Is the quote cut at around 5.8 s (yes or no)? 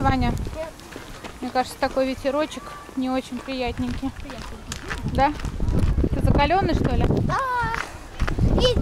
no